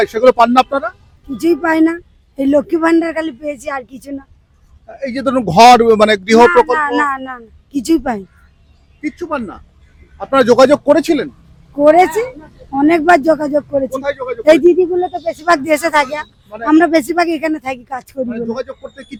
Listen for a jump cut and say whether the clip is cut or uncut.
uncut